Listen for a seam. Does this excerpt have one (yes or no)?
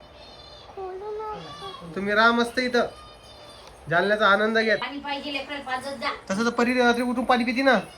yes